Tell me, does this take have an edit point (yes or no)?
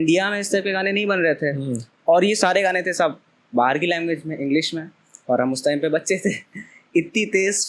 no